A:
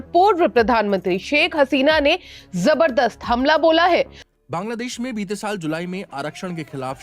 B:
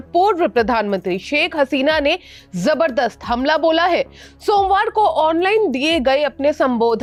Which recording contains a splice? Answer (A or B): A